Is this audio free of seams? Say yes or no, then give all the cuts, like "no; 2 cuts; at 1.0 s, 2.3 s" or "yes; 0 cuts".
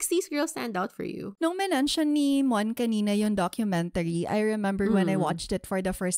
no; 1 cut; at 1.2 s